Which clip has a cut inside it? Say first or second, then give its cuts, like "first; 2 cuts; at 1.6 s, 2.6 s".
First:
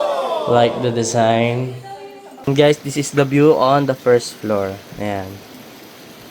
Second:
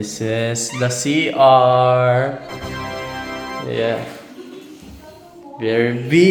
first; 2 cuts; at 1.8 s, 5.4 s